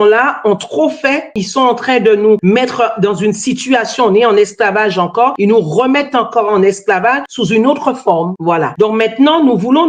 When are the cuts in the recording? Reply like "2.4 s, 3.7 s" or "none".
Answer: none